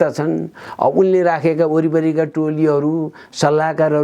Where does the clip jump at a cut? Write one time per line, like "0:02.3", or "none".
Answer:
none